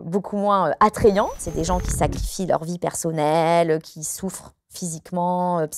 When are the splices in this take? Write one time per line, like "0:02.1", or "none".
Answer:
0:01.5